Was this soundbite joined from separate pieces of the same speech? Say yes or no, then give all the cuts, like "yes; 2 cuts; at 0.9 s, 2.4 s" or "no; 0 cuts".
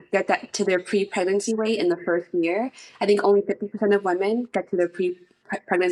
no; 0 cuts